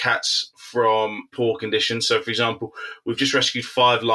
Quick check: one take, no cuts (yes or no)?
yes